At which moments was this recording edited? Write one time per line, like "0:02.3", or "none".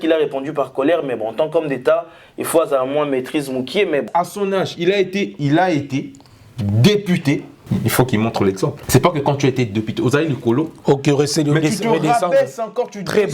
0:04.1
0:07.5
0:08.8